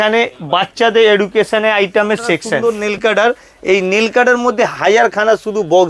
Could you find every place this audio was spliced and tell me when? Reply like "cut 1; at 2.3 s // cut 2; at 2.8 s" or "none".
cut 1; at 2.6 s